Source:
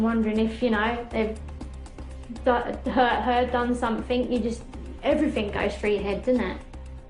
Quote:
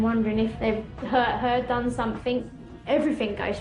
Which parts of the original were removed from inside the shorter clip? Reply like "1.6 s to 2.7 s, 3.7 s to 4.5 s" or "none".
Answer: 0.8 s to 2.6 s, 4.3 s to 4.6 s

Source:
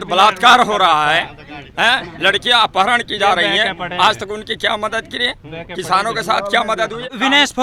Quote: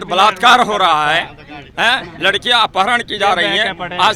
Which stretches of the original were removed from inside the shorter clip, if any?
none

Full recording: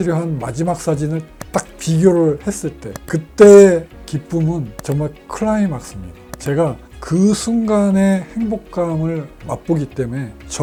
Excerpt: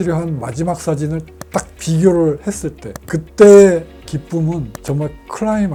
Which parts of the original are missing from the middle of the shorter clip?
none

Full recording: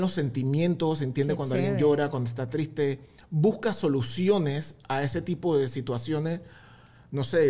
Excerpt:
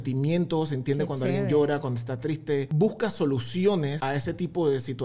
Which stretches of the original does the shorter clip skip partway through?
3.0 s to 3.3 s, 4.6 s to 4.8 s

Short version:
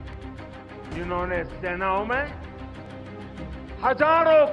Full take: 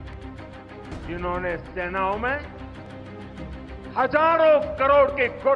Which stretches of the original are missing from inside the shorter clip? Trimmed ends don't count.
1.0 s to 1.1 s

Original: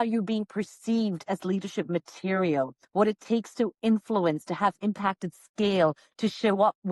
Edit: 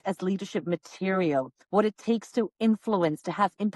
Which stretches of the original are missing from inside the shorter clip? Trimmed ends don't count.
none

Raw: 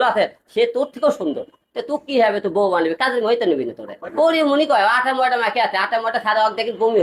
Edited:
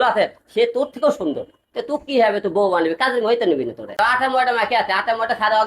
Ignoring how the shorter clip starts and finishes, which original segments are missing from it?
4.0 s to 4.8 s

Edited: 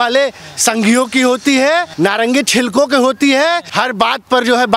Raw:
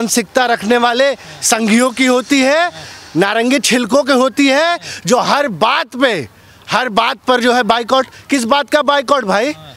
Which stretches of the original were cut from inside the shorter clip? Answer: 2.7 s to 3.1 s, 4.8 s to 6.6 s

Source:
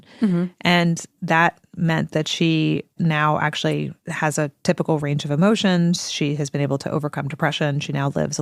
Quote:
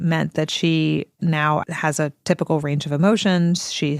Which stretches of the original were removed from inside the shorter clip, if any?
3.4 s to 4.0 s

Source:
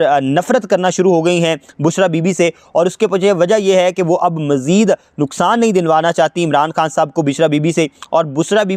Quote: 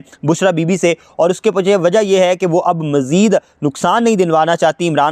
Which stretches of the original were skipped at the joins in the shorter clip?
none

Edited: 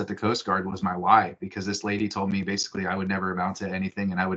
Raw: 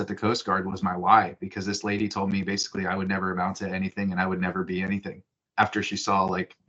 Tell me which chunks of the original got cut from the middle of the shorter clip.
none

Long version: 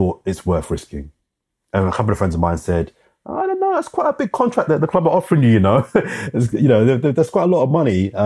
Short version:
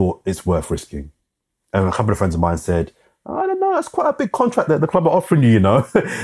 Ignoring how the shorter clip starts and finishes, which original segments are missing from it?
none

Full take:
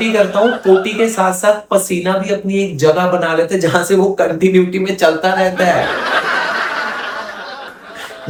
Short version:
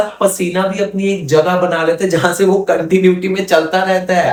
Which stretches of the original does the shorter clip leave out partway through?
none

